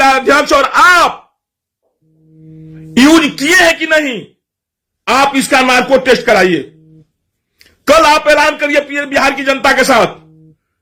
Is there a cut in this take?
no; 0 cuts

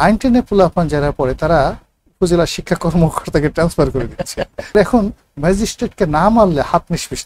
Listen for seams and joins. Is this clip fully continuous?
no; 1 cut; at 4.8 s

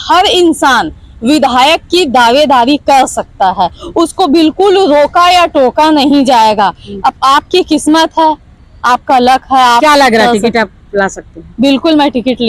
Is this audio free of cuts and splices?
yes; 0 cuts

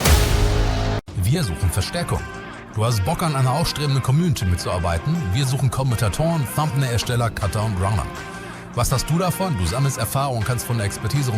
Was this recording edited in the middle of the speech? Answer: yes; 1 cut; at 1.0 s

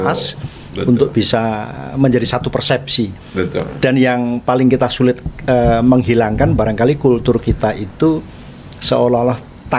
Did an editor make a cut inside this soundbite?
no; 0 cuts

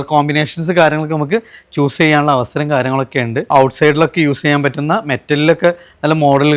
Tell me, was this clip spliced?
no; 0 cuts

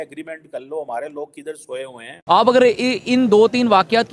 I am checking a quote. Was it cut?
yes; 1 cut; at 2.2 s

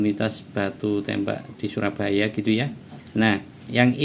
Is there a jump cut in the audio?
yes; 2 cuts; at 1.5 s, 3.2 s

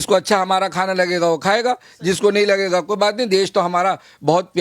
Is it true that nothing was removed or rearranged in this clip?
yes; 0 cuts

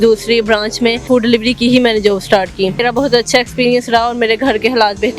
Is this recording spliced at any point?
yes; 2 cuts; at 1.0 s, 2.8 s

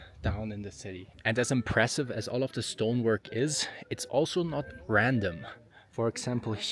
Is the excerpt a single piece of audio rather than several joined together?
no; 1 cut; at 1.1 s

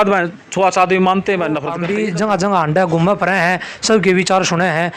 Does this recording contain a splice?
yes; 1 cut; at 1.8 s

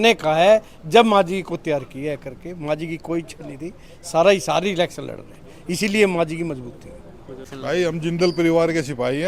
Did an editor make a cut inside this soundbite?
yes; 1 cut; at 7.5 s

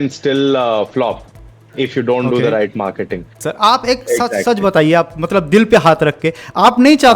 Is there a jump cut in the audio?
yes; 1 cut; at 3.4 s

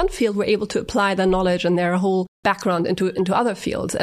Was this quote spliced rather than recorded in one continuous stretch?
yes; 1 cut; at 2.3 s

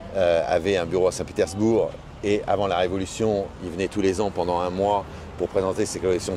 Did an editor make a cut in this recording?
no; 0 cuts

